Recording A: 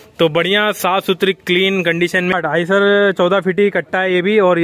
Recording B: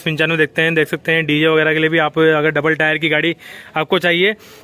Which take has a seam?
A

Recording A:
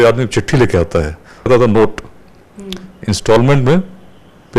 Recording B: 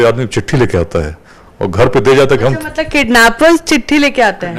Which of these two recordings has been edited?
A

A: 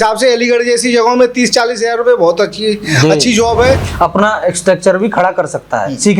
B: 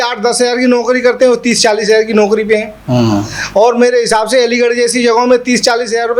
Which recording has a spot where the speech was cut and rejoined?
A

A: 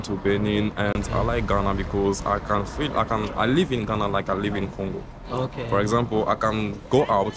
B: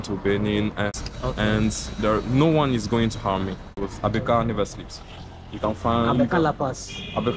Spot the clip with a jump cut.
B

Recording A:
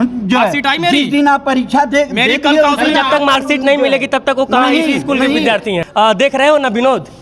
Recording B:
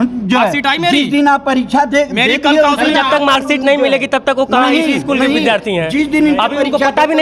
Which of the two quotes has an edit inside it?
A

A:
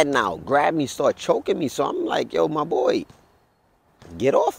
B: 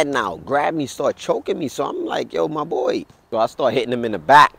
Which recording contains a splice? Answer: B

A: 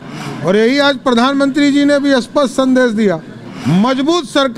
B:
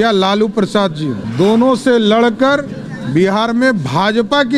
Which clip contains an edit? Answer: B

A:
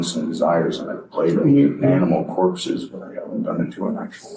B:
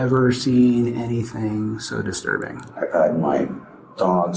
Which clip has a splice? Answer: B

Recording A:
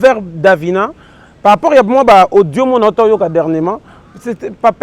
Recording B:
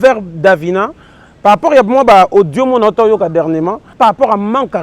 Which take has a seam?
B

